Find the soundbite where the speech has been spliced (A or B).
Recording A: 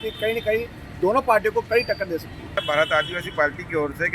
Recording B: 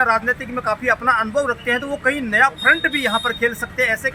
A